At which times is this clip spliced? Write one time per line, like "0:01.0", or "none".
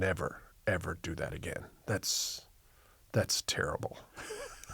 none